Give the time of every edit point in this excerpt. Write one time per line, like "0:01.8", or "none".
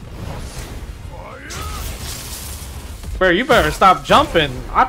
none